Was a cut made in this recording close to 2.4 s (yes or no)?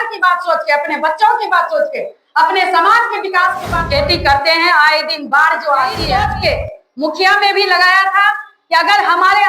no